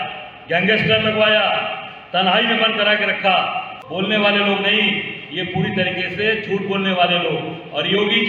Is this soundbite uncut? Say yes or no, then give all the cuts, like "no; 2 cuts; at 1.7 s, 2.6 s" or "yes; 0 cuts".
no; 1 cut; at 3.8 s